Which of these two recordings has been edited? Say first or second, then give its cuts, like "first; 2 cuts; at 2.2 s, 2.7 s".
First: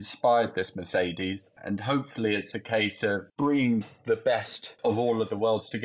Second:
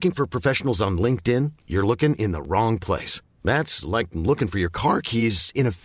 first; 3 cuts; at 1.6 s, 3.3 s, 4.8 s